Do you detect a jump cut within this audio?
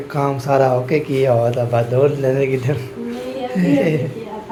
no; 0 cuts

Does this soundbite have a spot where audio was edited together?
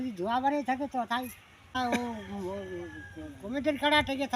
yes; 1 cut; at 1.7 s

